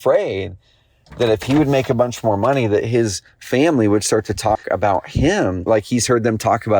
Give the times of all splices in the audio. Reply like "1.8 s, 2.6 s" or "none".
5.6 s